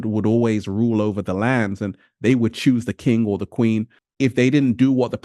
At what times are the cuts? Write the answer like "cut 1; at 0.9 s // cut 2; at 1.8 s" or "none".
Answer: cut 1; at 3.9 s